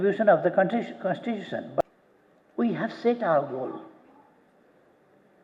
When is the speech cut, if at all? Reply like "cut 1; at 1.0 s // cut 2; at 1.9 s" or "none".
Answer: cut 1; at 1.8 s